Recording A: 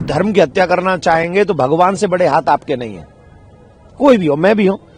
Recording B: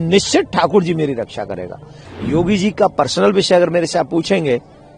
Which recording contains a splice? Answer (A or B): B